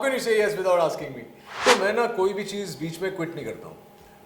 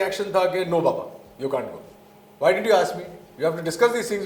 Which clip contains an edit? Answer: first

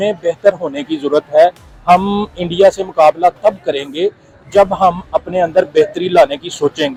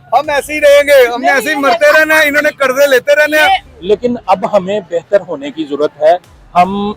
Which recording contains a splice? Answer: second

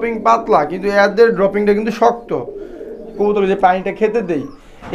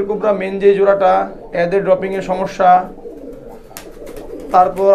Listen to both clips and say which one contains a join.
first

